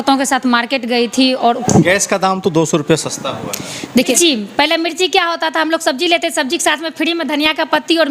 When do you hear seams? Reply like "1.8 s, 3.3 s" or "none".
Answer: 1.6 s, 4.2 s